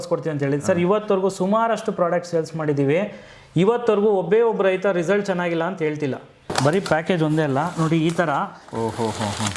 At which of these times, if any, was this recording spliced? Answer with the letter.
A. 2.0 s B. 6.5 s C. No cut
B